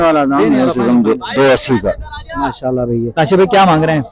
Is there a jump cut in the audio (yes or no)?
yes